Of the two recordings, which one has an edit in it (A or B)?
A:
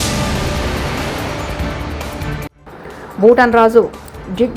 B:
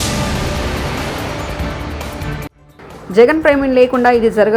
A